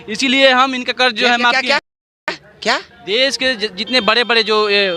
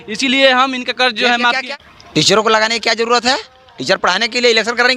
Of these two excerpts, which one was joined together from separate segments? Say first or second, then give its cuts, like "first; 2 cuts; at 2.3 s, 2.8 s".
second; 1 cut; at 1.6 s